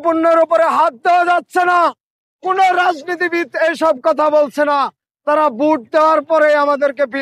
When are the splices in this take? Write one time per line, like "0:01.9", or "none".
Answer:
none